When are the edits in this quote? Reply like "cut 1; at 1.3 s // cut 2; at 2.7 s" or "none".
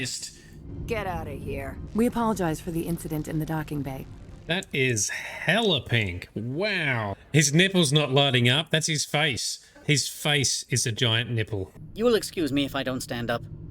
cut 1; at 1.8 s // cut 2; at 7.1 s // cut 3; at 11.7 s